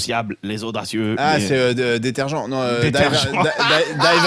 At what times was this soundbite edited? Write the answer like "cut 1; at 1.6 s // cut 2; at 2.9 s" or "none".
none